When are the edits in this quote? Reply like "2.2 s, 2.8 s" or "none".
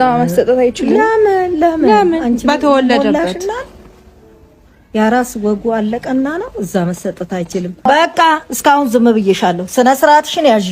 7.9 s